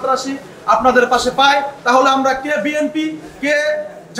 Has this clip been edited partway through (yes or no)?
no